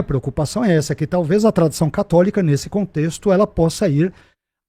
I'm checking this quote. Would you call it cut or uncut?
uncut